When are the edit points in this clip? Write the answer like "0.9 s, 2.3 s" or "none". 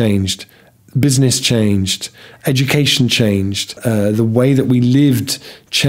3.7 s